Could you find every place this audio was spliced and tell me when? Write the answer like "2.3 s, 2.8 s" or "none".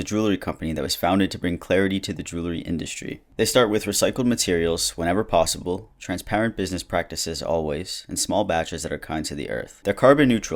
none